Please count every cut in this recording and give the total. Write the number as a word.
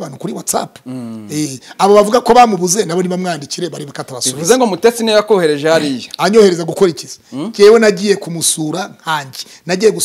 zero